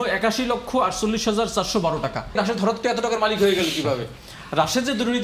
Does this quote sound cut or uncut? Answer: cut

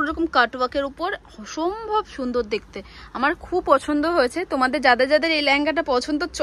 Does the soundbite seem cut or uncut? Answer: uncut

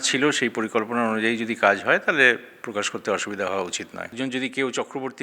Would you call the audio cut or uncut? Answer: cut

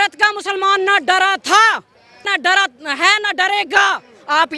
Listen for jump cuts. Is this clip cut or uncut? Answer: uncut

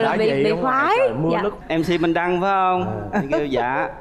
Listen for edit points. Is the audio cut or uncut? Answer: cut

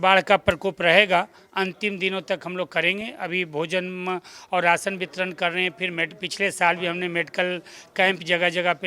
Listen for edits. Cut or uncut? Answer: uncut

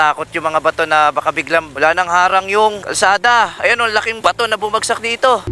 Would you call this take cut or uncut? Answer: cut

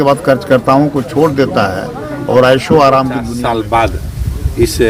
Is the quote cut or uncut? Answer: cut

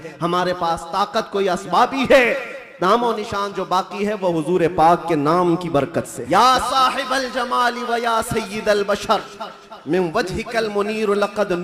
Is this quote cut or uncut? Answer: cut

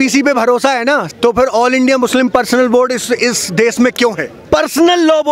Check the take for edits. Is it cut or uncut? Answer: cut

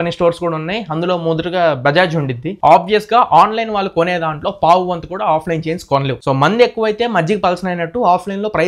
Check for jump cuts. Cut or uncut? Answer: cut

